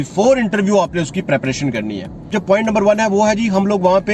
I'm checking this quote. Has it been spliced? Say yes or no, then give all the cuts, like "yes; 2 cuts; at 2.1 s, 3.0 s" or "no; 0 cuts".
yes; 1 cut; at 2.3 s